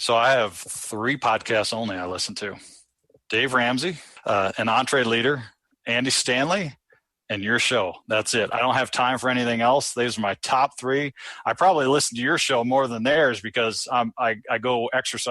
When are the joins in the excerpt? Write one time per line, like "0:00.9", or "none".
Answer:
0:04.1